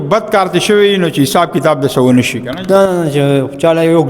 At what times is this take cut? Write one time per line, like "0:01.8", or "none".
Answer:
none